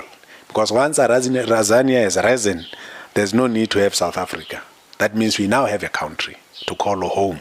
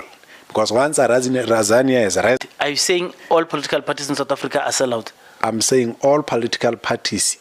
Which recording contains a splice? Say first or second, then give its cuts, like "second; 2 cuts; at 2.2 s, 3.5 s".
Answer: second; 1 cut; at 2.4 s